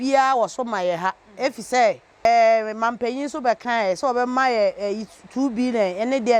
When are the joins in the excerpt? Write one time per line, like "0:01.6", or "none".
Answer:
0:02.3